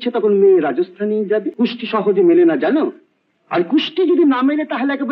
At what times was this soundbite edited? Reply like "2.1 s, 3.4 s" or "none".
1.5 s